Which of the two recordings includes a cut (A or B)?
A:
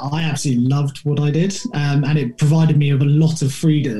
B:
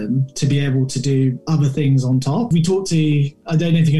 B